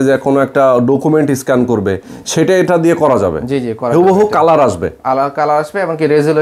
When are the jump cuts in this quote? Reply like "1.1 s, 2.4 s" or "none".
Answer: none